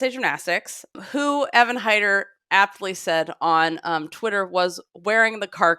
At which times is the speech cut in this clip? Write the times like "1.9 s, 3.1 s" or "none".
1.0 s

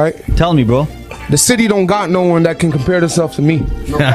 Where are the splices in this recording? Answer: 1.0 s

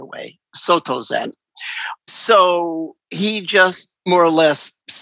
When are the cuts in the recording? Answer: 2.1 s

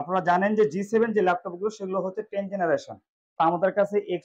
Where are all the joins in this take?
3.2 s

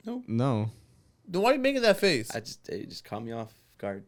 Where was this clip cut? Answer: none

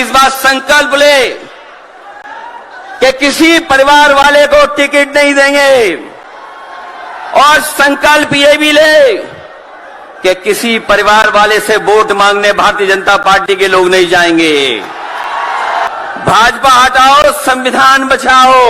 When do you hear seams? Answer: 15.9 s

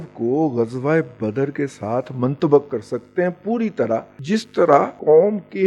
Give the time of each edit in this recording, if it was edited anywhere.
4.7 s

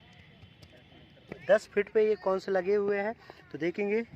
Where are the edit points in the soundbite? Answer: 1.4 s

